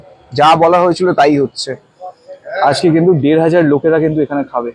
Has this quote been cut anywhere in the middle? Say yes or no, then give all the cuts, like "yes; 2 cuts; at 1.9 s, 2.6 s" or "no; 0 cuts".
no; 0 cuts